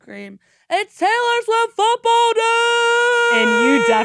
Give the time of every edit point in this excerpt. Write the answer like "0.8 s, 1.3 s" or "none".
none